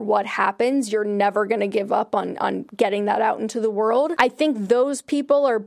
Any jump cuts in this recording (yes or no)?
yes